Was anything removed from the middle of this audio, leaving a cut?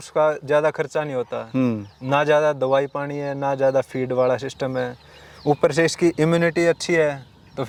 no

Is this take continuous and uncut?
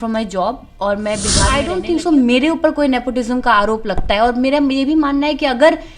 no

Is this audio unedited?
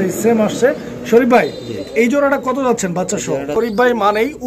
no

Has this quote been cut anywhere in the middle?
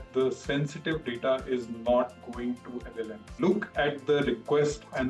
yes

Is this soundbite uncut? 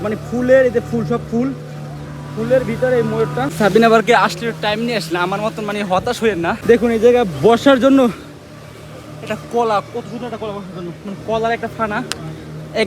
no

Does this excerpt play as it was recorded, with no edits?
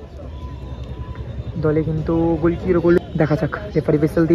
no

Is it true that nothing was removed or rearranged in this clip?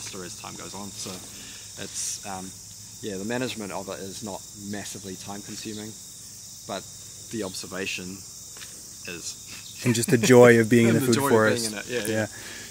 yes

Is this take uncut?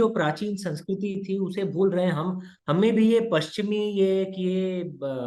yes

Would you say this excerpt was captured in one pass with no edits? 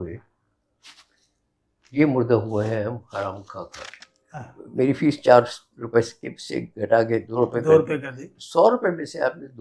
no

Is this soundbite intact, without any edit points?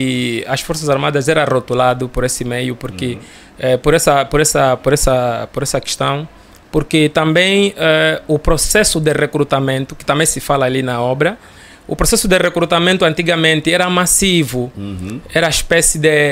yes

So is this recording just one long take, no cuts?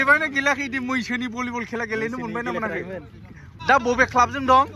no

